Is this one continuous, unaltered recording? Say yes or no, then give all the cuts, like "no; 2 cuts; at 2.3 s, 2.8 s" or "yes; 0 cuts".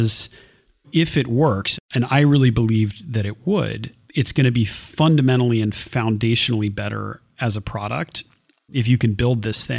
no; 1 cut; at 8.5 s